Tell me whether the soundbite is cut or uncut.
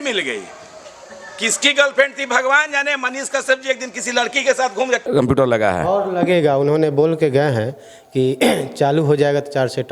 cut